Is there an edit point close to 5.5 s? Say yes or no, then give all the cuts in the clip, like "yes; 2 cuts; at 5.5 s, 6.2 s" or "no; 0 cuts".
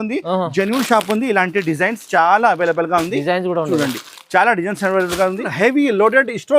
yes; 1 cut; at 5.5 s